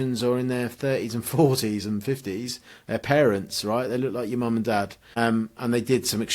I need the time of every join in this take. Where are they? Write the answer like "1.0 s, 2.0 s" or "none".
5.0 s